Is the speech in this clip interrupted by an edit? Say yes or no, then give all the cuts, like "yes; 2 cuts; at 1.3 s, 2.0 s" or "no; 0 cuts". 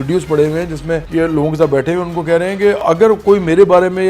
yes; 2 cuts; at 1.0 s, 2.8 s